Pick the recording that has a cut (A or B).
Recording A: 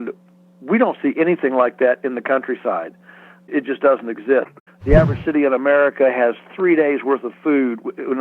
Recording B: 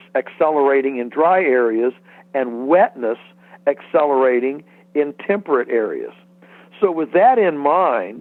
A